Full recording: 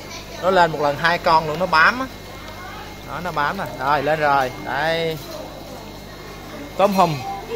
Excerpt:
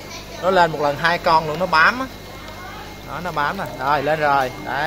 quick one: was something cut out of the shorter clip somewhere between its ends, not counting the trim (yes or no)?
no